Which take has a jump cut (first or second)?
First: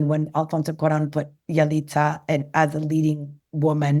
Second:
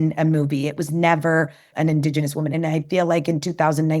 second